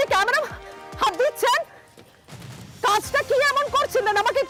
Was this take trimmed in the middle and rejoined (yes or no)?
no